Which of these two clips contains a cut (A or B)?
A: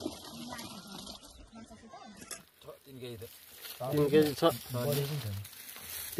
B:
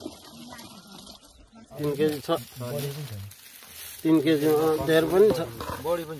B